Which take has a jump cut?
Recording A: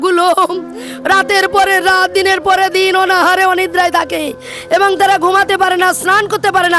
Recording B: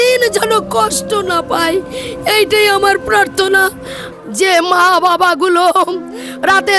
B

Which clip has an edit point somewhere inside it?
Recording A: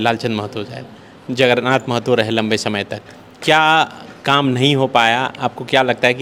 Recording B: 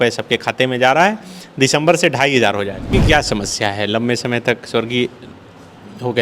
B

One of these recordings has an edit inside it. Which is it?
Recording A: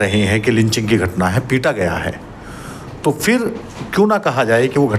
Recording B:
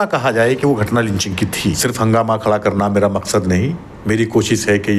B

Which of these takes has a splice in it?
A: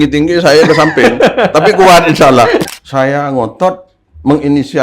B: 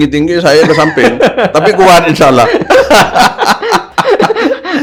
A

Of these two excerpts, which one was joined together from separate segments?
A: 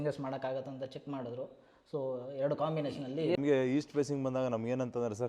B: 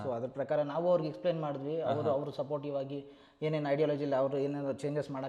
A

